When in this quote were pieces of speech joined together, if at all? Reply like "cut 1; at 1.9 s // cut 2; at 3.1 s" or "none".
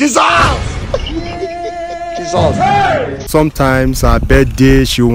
cut 1; at 3.3 s